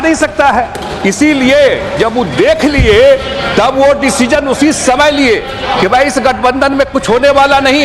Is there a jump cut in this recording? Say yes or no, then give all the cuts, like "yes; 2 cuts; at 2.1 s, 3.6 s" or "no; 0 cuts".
no; 0 cuts